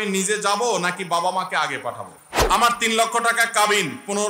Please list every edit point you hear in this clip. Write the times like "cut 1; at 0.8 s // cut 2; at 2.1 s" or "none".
cut 1; at 2.1 s